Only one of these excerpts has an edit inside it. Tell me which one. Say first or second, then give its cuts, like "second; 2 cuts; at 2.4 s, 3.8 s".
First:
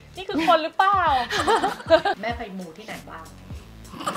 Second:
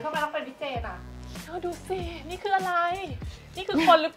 first; 1 cut; at 2.1 s